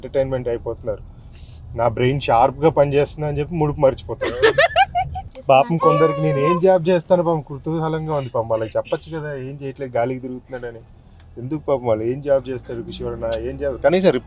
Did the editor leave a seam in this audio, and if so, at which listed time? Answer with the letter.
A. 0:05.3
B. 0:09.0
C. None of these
A